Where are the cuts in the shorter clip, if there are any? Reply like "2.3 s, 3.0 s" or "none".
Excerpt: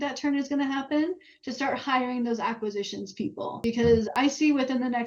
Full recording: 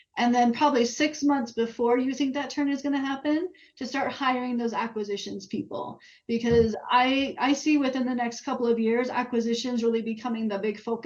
3.6 s, 4.1 s